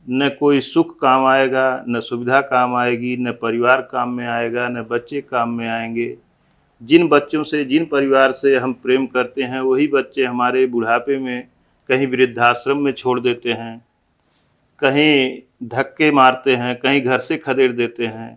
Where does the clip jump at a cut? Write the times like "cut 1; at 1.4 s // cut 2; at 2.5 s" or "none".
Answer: none